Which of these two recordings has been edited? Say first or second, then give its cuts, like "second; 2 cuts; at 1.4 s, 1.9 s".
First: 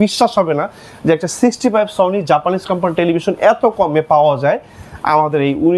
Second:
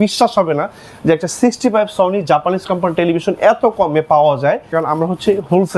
second; 1 cut; at 4.7 s